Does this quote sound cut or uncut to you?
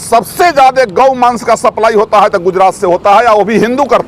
uncut